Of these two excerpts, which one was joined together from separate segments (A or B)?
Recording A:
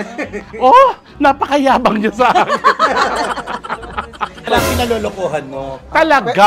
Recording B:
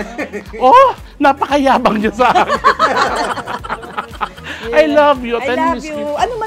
A